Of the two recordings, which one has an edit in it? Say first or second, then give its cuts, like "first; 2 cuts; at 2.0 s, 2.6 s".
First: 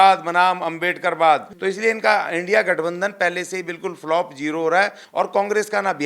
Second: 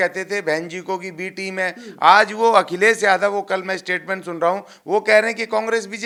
first; 2 cuts; at 1.5 s, 5.0 s